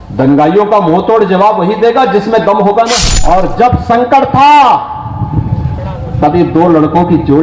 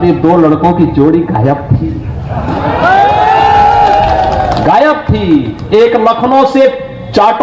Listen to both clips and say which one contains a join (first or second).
first